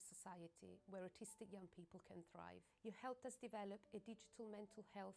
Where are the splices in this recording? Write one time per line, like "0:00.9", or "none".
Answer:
0:03.6